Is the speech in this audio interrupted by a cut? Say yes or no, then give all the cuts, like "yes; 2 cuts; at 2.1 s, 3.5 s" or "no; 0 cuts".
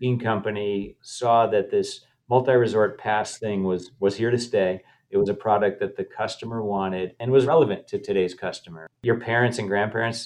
yes; 3 cuts; at 1.0 s, 7.4 s, 9.0 s